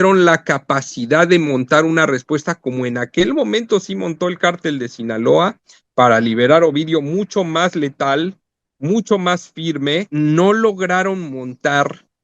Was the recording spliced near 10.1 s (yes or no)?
yes